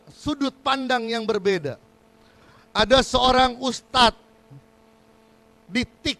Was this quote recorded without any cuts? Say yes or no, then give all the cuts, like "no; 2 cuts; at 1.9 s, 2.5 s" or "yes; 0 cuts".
yes; 0 cuts